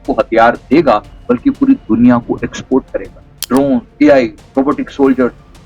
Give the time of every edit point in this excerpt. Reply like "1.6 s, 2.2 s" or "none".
3.3 s